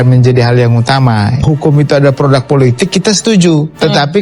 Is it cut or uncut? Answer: cut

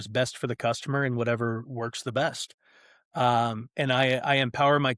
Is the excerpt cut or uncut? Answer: uncut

